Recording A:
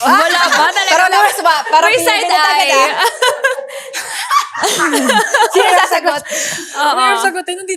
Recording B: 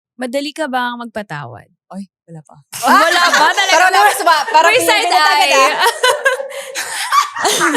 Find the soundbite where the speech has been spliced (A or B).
B